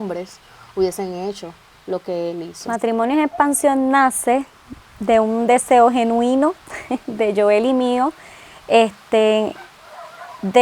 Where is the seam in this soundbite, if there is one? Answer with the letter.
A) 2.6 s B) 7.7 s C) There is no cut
A